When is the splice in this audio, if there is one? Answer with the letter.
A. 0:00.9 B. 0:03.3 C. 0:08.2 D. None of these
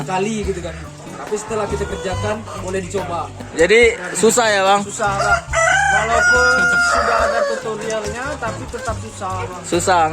B